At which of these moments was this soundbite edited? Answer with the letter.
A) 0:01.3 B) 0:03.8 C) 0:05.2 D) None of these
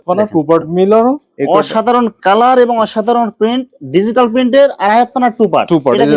A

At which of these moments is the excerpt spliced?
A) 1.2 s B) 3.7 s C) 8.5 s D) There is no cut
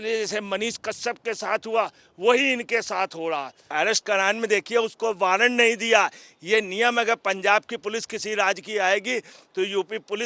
B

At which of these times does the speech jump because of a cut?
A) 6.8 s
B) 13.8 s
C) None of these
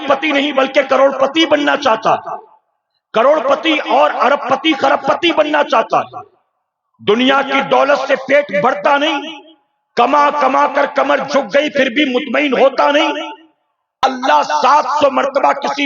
B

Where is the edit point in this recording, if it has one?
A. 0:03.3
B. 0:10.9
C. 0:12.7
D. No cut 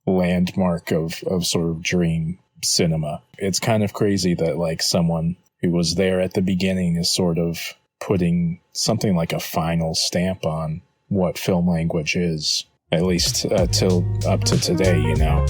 A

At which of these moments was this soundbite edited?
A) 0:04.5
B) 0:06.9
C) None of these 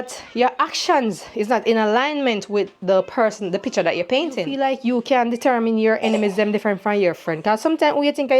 A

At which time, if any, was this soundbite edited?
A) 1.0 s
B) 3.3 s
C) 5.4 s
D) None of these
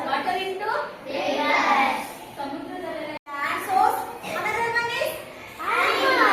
B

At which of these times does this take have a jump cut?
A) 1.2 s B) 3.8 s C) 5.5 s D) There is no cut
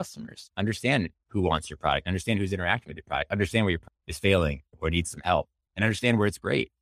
A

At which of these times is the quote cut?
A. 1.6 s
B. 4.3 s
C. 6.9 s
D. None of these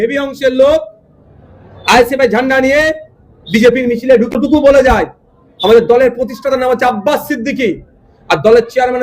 B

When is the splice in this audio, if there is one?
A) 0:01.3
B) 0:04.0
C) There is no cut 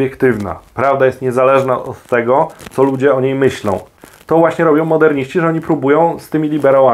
B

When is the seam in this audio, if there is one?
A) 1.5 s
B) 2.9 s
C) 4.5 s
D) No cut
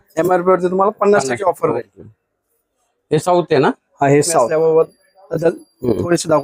C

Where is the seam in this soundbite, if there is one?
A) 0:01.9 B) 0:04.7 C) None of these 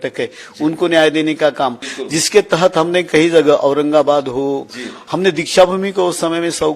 A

